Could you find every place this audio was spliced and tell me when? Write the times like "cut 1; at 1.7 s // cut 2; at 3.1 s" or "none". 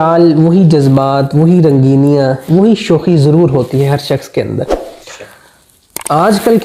none